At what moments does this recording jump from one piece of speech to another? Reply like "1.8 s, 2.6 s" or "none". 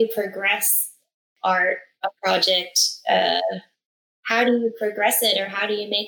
1.3 s